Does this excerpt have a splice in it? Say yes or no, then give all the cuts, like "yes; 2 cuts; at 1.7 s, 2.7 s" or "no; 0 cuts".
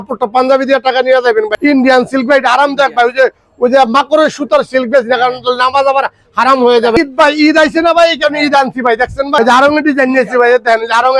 yes; 3 cuts; at 1.5 s, 7.0 s, 9.4 s